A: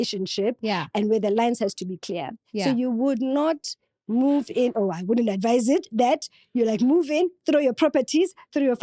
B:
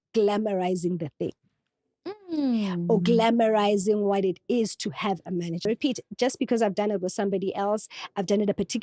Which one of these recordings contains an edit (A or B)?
B